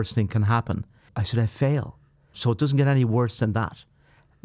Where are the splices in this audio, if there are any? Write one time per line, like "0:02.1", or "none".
0:01.1
0:02.3